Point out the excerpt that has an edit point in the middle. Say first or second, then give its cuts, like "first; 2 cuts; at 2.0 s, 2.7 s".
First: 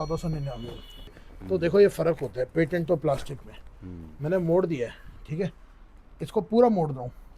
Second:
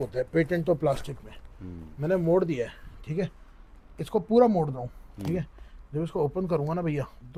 first; 1 cut; at 1.2 s